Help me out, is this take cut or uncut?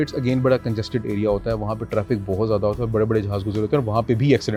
uncut